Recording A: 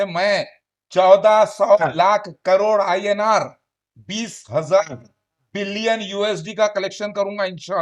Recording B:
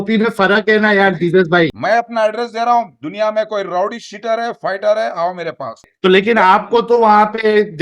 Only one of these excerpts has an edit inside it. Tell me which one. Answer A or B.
B